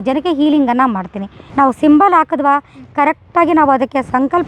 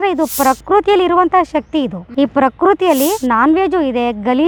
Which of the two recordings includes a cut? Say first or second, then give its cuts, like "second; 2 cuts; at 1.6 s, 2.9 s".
first; 1 cut; at 1.5 s